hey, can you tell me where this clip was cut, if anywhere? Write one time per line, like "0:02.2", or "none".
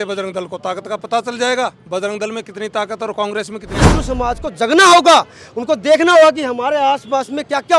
0:03.7

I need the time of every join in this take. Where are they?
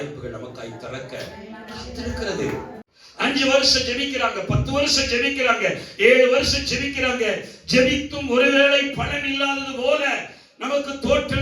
0:02.8

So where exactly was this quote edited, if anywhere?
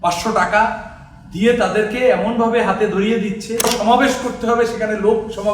0:03.6

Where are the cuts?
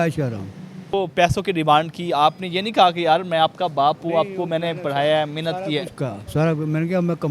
0:00.9

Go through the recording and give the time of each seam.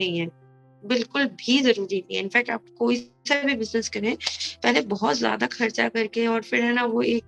none

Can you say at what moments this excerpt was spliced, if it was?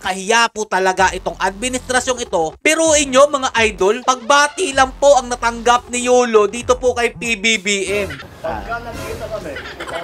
0:02.5
0:08.3

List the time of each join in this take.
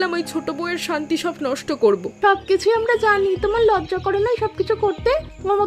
0:02.1

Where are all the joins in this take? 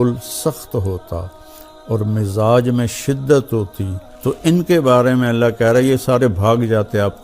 0:04.5

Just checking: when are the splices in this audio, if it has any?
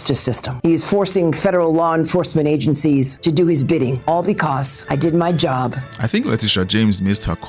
0:05.8

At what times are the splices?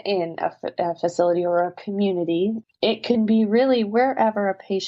0:02.7

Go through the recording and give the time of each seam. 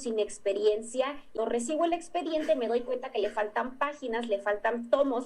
0:01.3

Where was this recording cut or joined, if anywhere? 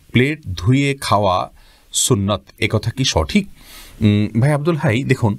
none

